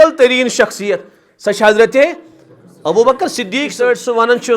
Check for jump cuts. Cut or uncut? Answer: cut